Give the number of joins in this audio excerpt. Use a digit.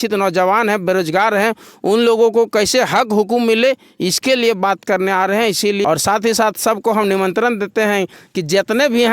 1